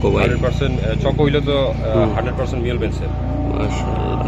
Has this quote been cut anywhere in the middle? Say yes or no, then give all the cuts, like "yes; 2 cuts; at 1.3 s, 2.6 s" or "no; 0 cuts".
no; 0 cuts